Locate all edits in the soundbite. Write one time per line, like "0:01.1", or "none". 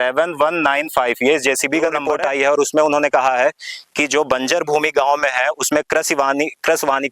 0:02.1